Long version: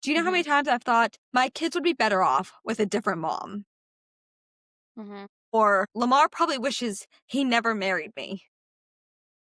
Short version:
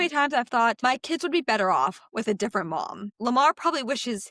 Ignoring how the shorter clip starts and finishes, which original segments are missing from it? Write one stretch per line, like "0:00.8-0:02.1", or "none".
0:01.1-0:01.3
0:03.7-0:05.9